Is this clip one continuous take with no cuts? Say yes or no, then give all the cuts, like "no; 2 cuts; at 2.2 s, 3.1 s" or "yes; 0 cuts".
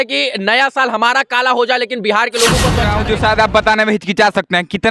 no; 1 cut; at 2.9 s